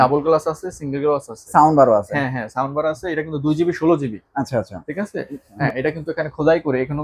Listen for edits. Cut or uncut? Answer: cut